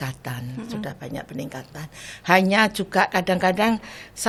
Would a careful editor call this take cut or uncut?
uncut